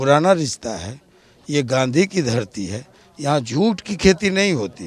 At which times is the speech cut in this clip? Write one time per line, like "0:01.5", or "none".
none